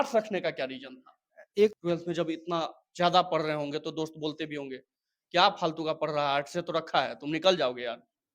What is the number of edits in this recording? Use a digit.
1